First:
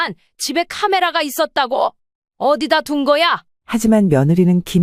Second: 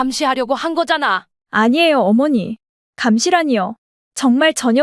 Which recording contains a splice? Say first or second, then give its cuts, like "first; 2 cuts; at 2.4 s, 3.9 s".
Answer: first; 1 cut; at 3.5 s